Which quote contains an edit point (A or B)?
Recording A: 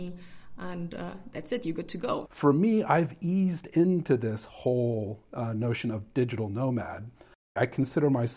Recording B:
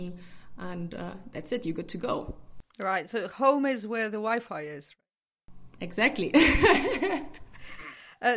A